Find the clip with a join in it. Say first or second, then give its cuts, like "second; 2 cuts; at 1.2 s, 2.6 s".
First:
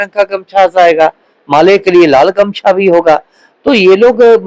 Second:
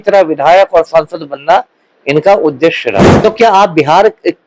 second; 1 cut; at 3.1 s